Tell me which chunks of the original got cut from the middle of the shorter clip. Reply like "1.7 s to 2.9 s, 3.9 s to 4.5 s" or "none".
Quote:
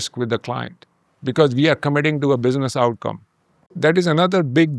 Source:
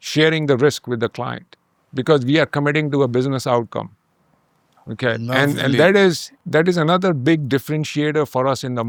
4.3 s to 6.3 s